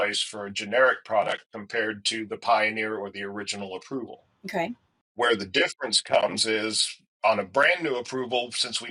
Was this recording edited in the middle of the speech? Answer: no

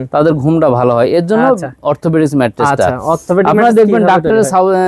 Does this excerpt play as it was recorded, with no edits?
yes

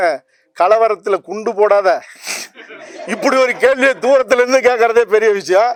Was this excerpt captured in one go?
yes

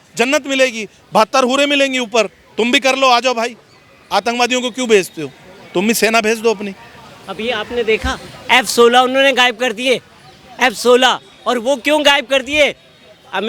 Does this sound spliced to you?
no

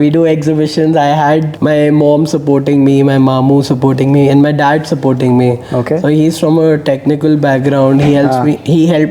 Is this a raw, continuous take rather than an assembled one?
no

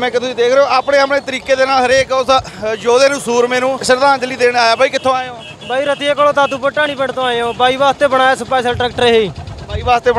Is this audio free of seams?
no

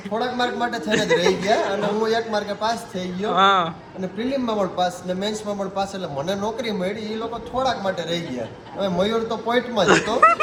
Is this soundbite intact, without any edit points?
yes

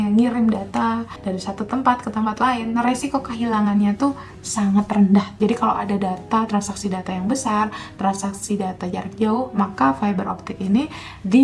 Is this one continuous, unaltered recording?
no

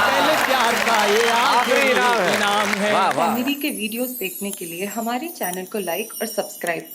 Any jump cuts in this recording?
yes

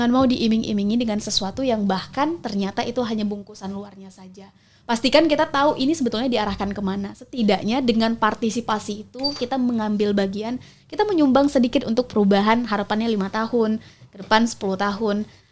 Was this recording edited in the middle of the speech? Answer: no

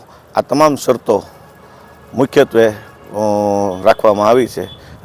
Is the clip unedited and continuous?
yes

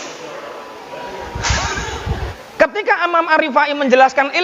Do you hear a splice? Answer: yes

